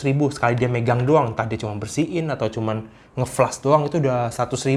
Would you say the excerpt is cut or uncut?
uncut